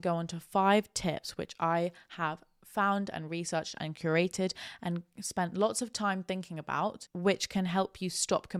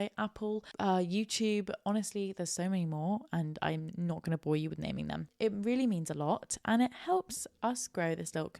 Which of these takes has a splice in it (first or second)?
second